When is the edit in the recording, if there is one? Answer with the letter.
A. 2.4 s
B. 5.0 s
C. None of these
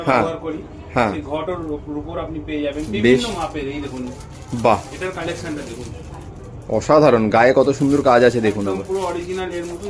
C